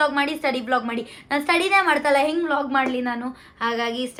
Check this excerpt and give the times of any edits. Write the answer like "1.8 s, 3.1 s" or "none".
none